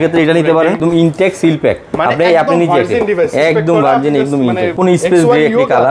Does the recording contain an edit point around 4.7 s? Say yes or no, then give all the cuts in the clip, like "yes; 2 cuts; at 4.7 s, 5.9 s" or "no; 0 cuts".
yes; 2 cuts; at 0.8 s, 4.7 s